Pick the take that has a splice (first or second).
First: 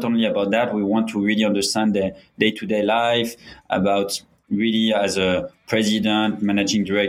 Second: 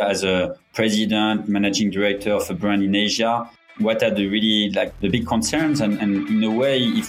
second